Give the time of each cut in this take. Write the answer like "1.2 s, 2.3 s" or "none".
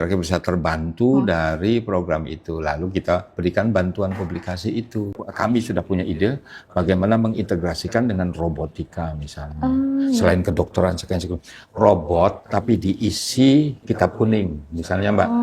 5.1 s